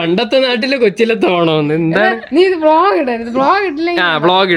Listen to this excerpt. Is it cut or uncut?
uncut